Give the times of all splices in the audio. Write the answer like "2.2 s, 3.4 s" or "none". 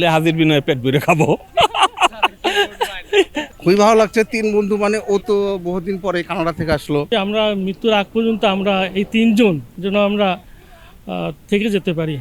3.5 s, 7.1 s, 9.7 s

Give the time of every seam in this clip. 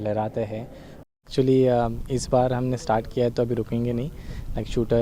1.2 s

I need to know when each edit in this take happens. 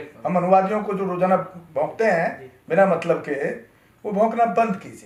none

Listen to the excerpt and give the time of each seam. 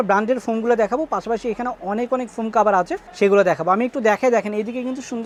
none

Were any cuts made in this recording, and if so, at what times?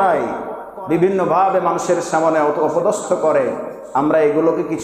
none

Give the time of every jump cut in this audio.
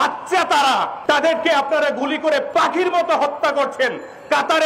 0.9 s, 2.5 s

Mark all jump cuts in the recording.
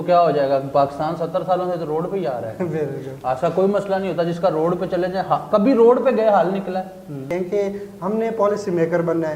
7.3 s

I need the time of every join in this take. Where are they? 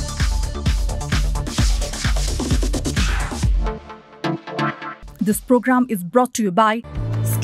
4.9 s

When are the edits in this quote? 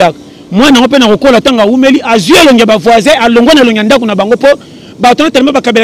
none

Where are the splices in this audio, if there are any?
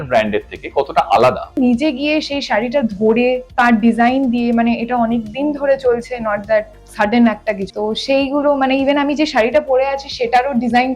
1.5 s

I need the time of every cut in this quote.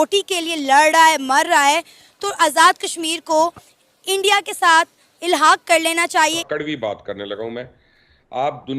6.4 s

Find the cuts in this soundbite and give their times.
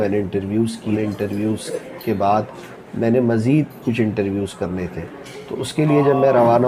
none

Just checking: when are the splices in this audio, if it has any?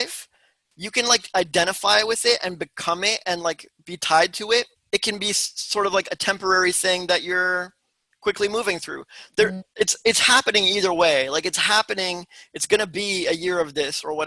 4.8 s

